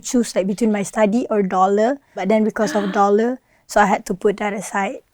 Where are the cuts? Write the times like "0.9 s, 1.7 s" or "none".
2.2 s